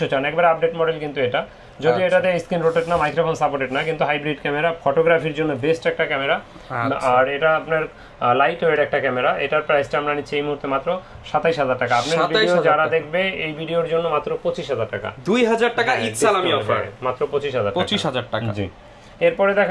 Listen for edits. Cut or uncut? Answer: uncut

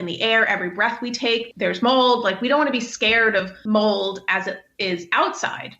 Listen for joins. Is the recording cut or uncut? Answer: cut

